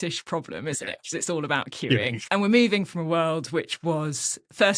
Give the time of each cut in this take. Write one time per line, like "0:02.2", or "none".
0:02.2